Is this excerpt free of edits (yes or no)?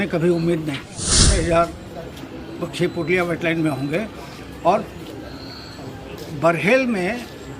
no